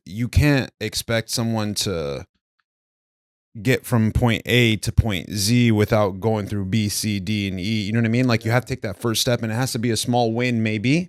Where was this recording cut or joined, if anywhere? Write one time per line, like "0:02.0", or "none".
none